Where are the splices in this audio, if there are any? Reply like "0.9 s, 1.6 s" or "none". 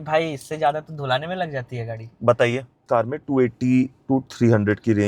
2.8 s